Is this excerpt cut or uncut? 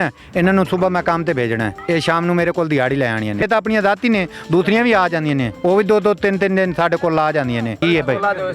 cut